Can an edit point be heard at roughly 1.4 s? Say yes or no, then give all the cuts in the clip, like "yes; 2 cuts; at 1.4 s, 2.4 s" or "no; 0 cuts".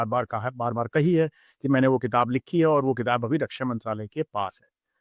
no; 0 cuts